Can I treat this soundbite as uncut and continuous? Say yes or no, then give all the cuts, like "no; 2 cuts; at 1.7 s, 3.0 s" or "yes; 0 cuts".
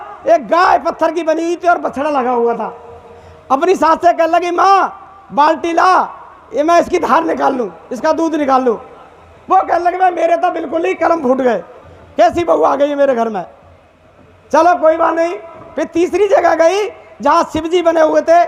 yes; 0 cuts